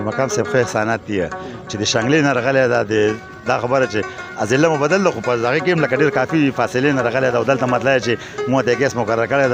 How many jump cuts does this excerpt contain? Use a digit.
0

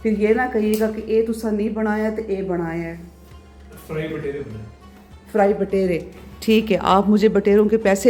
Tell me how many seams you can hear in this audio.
0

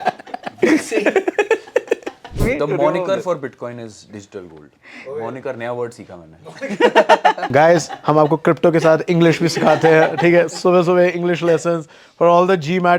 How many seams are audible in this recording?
1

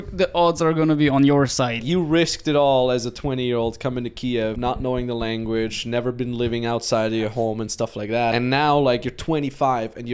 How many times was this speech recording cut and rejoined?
3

